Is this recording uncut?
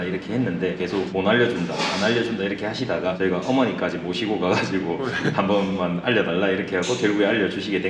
yes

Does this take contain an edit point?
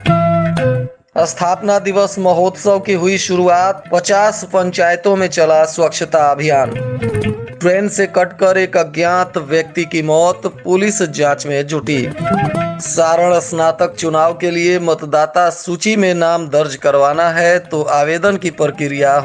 yes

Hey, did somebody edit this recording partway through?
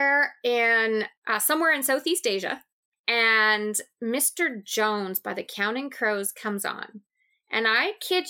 no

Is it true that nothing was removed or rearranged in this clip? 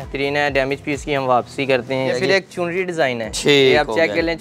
no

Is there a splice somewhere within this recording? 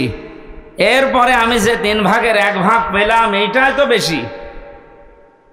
no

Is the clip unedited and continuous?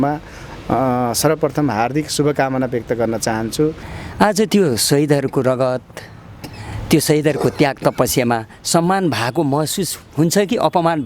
no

